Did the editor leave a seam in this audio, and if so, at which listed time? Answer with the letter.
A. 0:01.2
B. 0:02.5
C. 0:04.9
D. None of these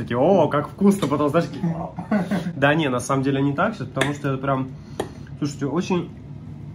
D